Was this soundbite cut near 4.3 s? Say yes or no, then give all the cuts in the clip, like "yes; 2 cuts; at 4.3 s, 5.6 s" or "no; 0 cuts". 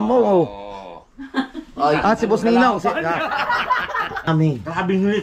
yes; 1 cut; at 4.3 s